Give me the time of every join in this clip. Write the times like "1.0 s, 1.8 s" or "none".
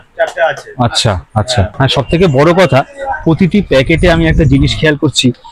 1.7 s